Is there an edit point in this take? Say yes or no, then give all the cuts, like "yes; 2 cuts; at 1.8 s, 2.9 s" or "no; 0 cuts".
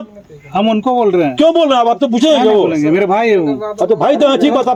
no; 0 cuts